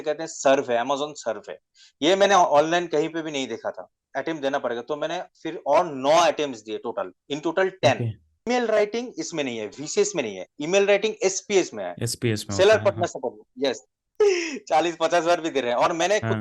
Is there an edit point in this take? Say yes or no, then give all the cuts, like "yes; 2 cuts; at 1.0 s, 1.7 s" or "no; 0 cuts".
yes; 3 cuts; at 4.0 s, 8.5 s, 14.0 s